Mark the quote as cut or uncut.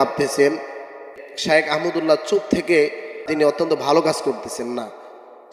cut